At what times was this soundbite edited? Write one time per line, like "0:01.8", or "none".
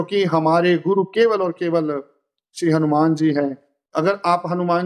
none